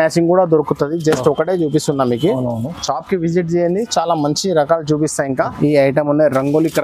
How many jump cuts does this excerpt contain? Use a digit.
1